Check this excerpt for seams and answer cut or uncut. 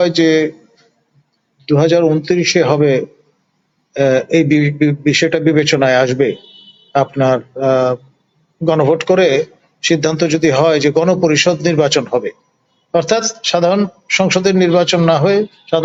uncut